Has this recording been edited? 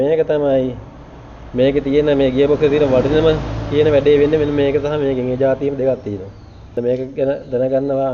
no; 0 cuts

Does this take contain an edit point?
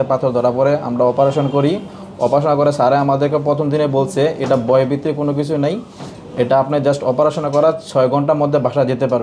no; 0 cuts

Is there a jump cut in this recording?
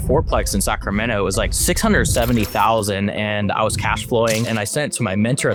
no; 0 cuts

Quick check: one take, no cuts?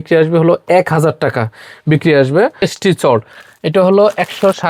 no; 1 cut; at 2.7 s

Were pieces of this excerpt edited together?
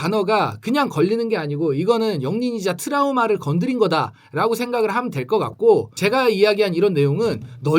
yes; 1 cut; at 5.9 s

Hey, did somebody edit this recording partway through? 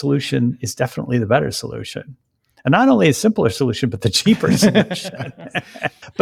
no; 0 cuts

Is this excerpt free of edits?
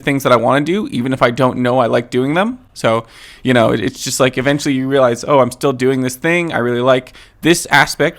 yes; 0 cuts

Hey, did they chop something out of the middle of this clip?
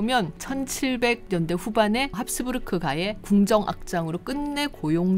no; 0 cuts

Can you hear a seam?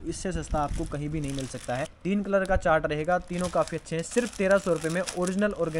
yes; 1 cut; at 1.9 s

